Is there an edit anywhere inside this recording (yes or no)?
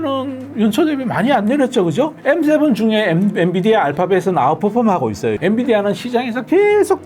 yes